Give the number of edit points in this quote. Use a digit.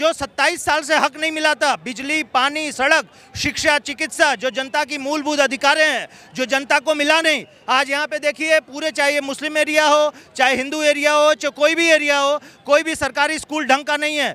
0